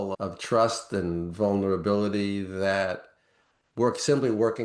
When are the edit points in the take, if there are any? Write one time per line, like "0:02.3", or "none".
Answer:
none